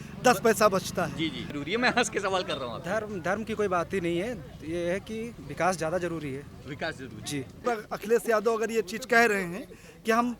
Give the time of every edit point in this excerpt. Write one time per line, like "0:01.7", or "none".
0:01.6
0:07.7